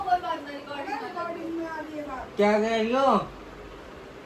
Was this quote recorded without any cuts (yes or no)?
yes